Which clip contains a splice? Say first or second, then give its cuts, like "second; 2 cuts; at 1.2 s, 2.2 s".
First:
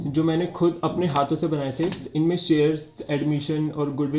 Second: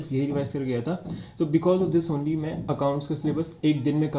first; 1 cut; at 2.0 s